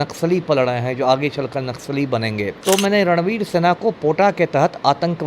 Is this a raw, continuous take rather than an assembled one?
no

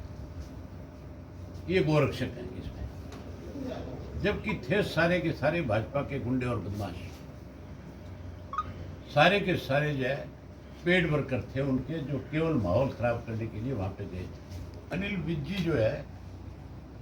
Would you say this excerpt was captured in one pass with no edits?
no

